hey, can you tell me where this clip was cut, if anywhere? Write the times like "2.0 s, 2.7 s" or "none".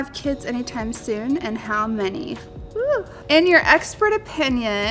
2.6 s

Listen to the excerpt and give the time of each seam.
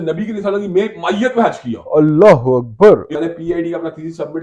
3.1 s

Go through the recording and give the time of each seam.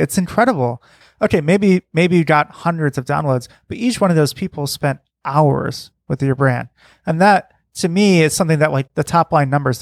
0.9 s, 8.9 s

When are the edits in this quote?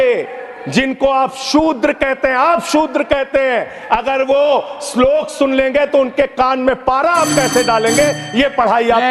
none

